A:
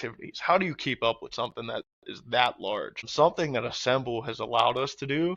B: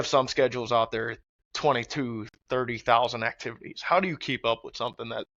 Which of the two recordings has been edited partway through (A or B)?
A